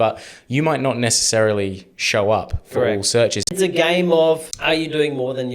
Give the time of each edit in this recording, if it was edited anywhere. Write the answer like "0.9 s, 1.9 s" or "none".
3.5 s, 4.5 s

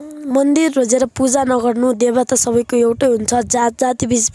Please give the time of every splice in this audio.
none

